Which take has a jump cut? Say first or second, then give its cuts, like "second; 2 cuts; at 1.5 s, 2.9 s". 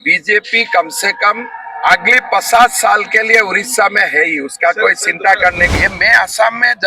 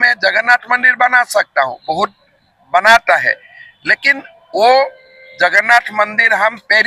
first; 1 cut; at 5.7 s